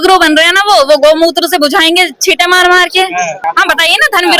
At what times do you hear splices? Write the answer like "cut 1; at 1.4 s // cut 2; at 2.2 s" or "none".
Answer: cut 1; at 3.3 s